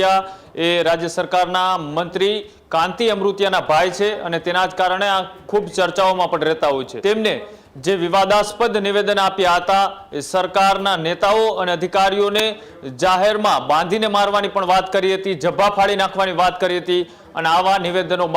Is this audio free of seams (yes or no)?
no